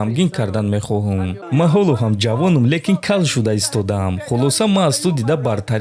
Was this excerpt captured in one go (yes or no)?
no